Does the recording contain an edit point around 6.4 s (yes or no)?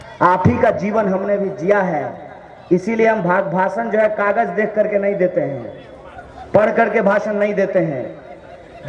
no